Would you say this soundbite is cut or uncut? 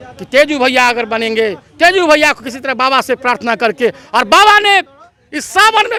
uncut